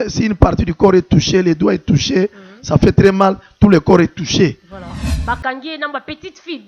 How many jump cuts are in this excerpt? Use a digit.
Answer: 1